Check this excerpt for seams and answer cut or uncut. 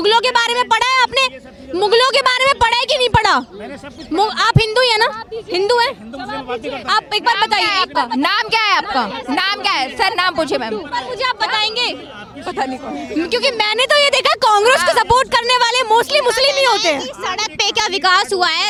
uncut